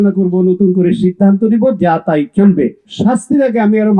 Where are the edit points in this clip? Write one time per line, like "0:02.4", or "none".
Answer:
0:02.8